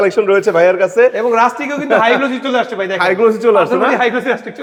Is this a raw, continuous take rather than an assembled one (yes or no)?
yes